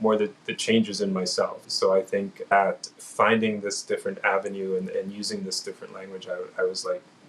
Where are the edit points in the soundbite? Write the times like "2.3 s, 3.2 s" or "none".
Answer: 2.5 s